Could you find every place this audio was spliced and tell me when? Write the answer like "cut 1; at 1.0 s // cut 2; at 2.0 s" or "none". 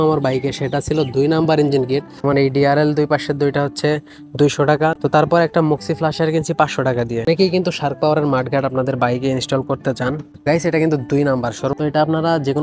cut 1; at 2.2 s // cut 2; at 7.2 s // cut 3; at 11.7 s